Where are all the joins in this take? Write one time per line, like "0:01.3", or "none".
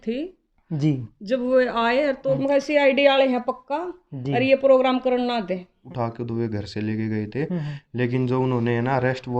0:02.4
0:05.8